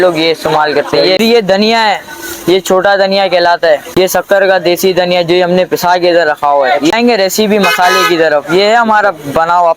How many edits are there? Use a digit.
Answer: 3